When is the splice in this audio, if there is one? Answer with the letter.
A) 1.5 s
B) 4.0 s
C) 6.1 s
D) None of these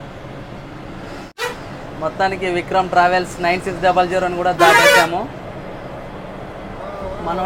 A